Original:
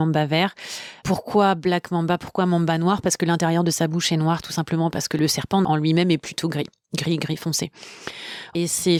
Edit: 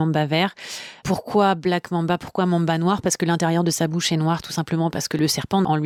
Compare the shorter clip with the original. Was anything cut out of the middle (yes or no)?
no